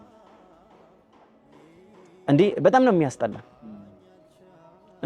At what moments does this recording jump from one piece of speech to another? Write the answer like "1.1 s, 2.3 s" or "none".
none